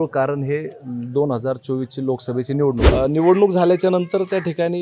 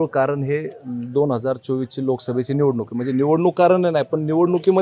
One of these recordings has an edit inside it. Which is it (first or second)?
first